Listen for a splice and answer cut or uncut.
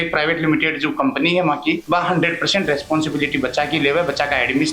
cut